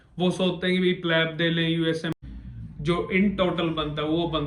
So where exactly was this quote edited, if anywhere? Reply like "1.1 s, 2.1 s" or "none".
2.1 s